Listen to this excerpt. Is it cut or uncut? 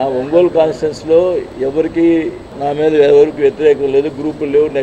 cut